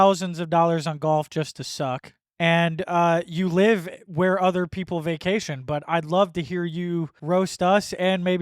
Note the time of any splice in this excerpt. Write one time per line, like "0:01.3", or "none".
0:02.2
0:07.1